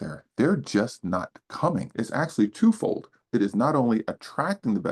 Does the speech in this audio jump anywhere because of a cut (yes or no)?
yes